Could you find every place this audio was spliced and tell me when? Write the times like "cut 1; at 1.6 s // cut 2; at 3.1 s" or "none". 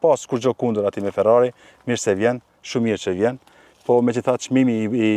none